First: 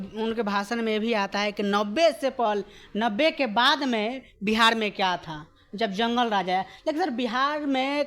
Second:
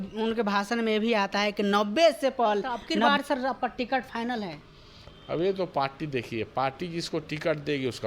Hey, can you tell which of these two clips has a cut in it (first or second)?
second